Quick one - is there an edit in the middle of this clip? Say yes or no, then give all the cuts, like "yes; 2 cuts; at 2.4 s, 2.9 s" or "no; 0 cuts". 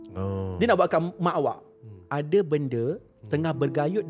yes; 1 cut; at 1.7 s